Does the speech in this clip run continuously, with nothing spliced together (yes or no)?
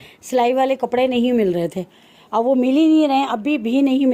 yes